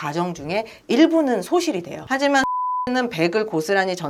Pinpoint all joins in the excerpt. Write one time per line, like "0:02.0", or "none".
none